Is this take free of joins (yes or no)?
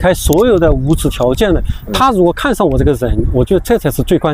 yes